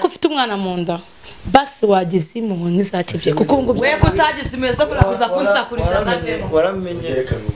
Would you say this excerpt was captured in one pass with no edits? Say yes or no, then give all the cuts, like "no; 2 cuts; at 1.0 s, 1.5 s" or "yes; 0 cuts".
yes; 0 cuts